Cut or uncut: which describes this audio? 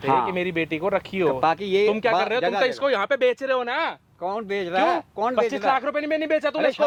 uncut